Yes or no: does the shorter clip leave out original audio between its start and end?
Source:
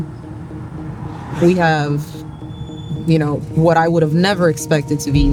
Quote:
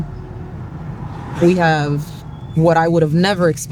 yes